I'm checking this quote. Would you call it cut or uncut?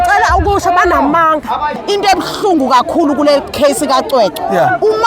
cut